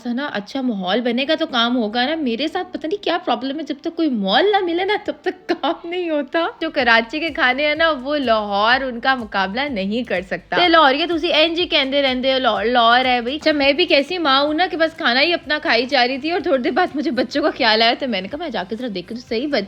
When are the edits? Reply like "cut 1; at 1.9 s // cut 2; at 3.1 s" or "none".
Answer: cut 1; at 6.6 s // cut 2; at 13.4 s